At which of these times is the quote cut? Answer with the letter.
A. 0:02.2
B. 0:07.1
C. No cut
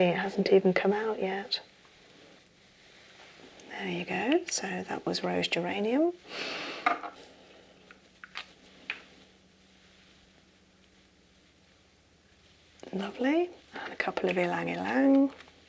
B